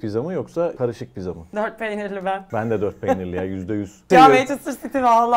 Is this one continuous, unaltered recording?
no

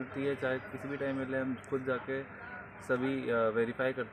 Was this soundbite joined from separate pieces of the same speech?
no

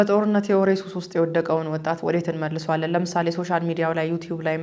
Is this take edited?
no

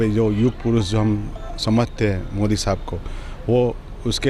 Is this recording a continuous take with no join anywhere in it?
yes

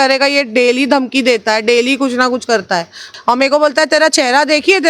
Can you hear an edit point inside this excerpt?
yes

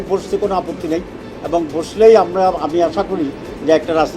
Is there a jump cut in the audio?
no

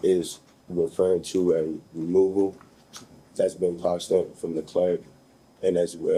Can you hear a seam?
no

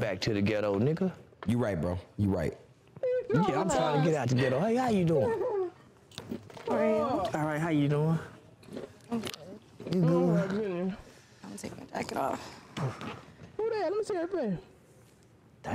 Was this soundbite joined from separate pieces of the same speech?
no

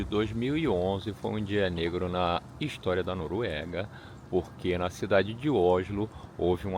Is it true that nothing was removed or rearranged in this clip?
yes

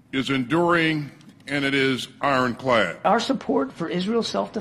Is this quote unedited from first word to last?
no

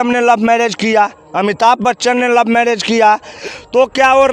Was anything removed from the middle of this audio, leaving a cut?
yes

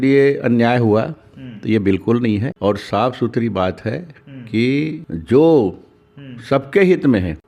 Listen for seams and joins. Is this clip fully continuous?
yes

